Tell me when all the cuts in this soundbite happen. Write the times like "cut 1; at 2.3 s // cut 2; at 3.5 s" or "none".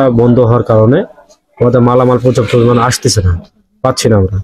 none